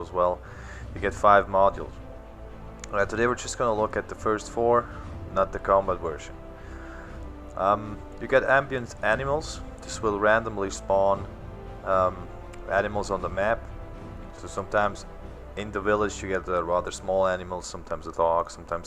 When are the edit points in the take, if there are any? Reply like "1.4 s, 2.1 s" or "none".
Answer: 7.3 s